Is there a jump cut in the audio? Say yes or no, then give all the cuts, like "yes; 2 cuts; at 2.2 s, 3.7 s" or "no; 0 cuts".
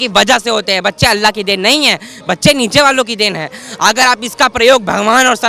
no; 0 cuts